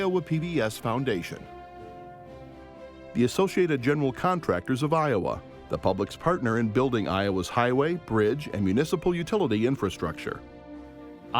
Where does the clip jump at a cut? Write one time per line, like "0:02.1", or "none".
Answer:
0:01.4
0:03.1